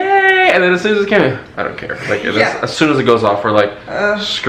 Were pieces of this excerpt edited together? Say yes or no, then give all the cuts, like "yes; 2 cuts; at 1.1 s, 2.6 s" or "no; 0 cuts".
no; 0 cuts